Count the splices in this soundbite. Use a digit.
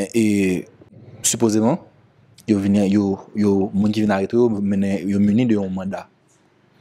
1